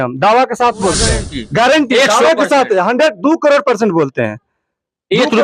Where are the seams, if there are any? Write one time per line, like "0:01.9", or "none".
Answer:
0:01.0